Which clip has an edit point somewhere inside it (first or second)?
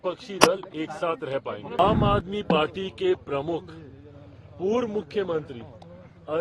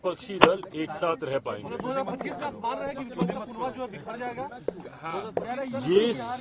first